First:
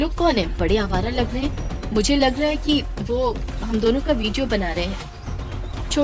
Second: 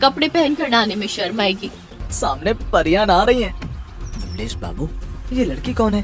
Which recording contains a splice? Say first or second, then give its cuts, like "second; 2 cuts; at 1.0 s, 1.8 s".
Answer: second; 1 cut; at 2.0 s